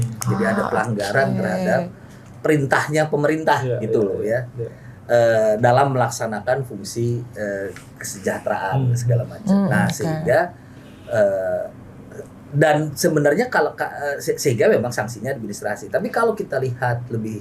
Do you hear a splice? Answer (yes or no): no